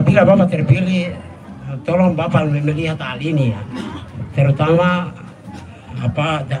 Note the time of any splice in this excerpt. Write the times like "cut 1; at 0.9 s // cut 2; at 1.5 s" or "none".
none